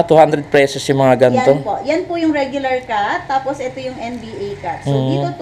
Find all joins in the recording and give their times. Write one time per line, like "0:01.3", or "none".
none